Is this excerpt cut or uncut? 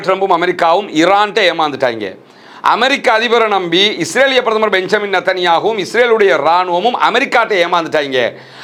uncut